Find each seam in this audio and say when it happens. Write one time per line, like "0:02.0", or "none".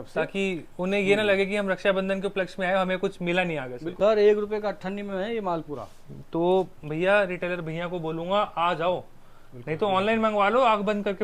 0:03.9